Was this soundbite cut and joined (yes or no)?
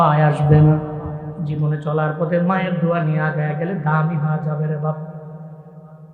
yes